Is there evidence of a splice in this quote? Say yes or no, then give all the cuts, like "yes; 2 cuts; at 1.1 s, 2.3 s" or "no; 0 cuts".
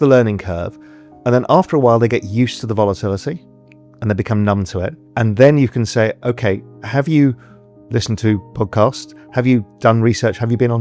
yes; 1 cut; at 5.0 s